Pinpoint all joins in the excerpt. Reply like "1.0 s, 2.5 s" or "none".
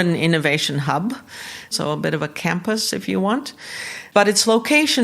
1.7 s, 4.0 s